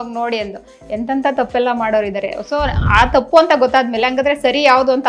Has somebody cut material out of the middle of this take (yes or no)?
no